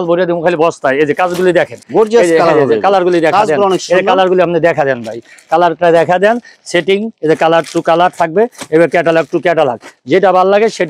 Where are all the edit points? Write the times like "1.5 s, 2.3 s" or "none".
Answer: none